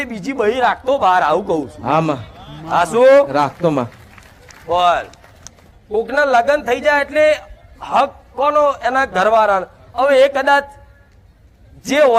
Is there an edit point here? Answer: no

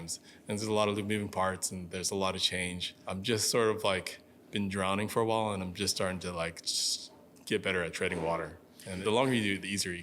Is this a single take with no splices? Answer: no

